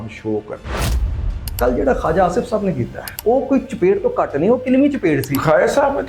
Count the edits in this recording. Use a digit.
2